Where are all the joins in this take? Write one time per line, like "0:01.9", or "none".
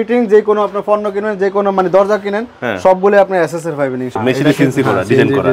0:04.2

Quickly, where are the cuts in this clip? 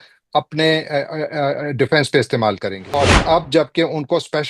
0:03.0

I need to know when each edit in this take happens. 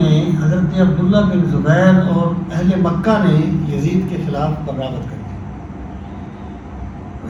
none

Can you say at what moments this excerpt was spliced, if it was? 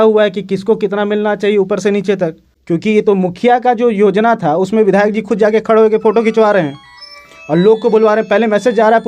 0:02.5

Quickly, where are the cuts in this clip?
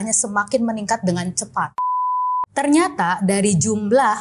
0:01.9

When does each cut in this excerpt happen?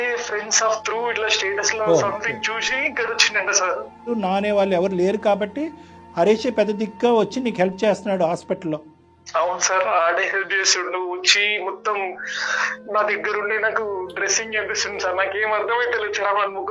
0:04.1

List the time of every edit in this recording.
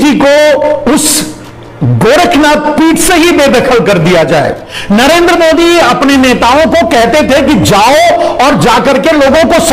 0:04.7

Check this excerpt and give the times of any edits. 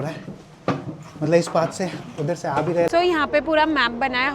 0:02.9

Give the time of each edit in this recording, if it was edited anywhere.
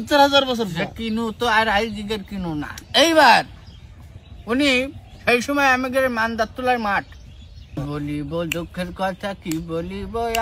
0:07.8

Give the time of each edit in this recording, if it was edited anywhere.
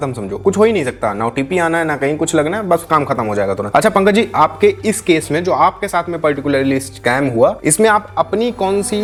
none

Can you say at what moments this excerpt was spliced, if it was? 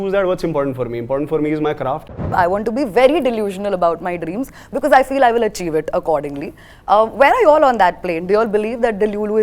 0:02.2

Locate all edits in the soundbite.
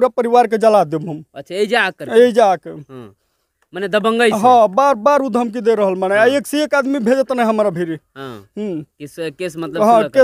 none

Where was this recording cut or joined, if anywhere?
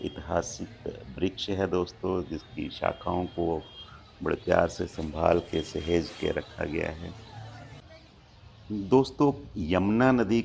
none

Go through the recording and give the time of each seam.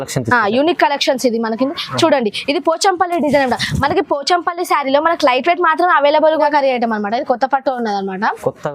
0:06.5

